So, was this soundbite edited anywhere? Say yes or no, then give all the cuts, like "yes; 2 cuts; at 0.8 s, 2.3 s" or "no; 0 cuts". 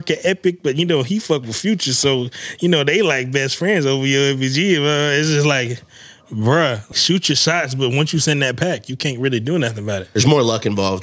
yes; 2 cuts; at 6.9 s, 10.0 s